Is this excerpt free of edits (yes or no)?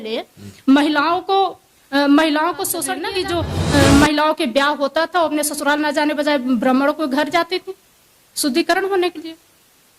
no